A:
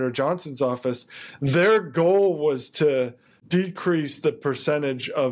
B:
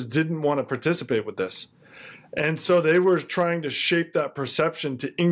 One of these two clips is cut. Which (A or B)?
A